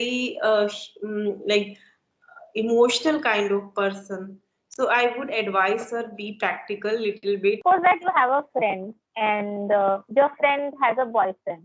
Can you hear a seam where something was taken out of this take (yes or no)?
yes